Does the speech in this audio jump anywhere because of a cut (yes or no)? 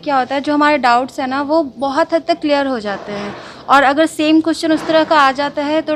no